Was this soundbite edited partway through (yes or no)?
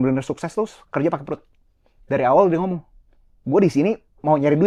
no